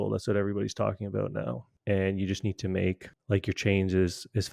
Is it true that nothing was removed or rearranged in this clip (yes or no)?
no